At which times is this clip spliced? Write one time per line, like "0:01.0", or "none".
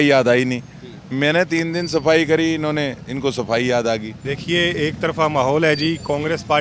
0:04.1